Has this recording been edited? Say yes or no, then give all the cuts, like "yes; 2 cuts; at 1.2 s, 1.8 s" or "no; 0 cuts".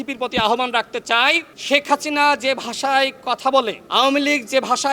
yes; 2 cuts; at 1.5 s, 3.8 s